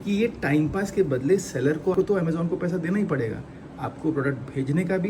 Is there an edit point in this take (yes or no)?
no